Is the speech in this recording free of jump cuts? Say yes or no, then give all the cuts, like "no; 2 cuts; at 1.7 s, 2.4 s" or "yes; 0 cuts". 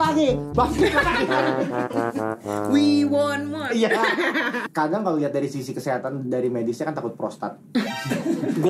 no; 1 cut; at 4.6 s